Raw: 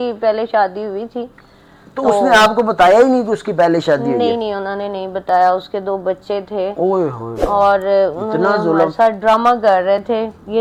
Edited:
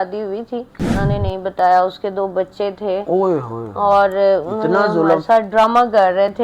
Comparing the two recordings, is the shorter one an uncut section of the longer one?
no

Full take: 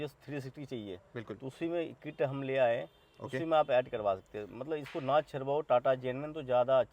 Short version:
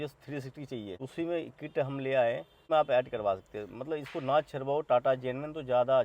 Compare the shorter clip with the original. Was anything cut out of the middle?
yes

